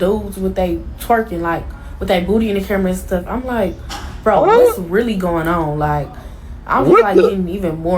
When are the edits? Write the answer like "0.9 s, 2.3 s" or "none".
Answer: none